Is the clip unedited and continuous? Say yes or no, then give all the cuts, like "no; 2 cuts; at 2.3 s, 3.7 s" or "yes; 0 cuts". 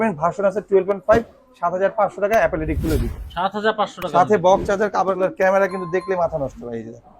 no; 1 cut; at 5.2 s